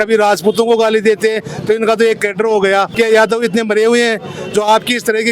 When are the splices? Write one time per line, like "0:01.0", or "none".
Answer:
0:02.9